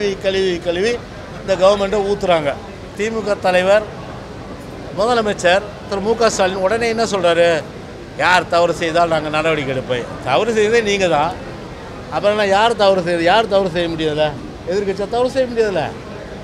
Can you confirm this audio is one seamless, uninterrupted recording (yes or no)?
no